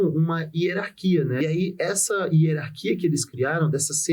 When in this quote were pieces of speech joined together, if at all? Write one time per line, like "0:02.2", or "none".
0:01.4